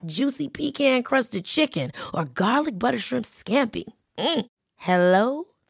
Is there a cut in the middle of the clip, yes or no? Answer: no